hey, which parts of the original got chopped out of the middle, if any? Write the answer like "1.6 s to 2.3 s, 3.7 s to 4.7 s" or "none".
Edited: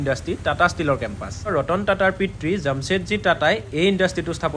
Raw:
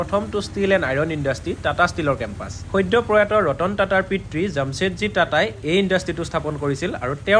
2.7 s to 3.4 s